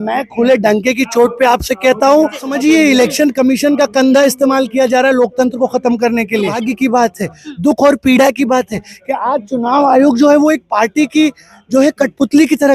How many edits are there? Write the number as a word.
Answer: two